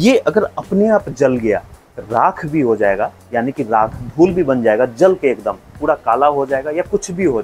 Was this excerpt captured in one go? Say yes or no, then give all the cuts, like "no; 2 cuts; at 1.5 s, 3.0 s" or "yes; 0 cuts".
yes; 0 cuts